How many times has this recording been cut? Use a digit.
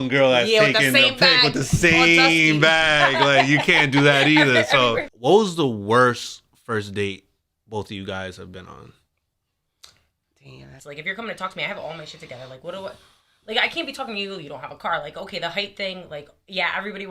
2